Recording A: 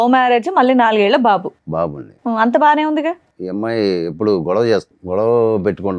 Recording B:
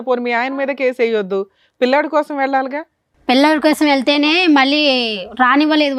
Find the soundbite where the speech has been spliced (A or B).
A